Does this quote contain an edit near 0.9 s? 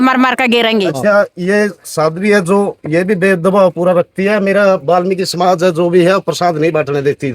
yes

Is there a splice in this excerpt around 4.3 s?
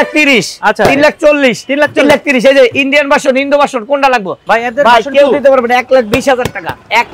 yes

